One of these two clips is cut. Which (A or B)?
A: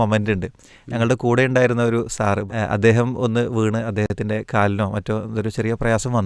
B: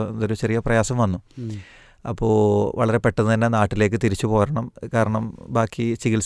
A